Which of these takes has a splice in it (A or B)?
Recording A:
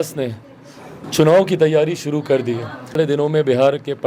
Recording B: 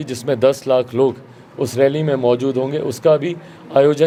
A